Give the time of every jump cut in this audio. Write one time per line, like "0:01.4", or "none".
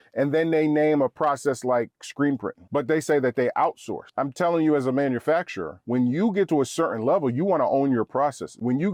none